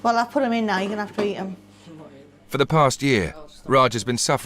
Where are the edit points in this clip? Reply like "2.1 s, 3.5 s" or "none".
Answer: 2.4 s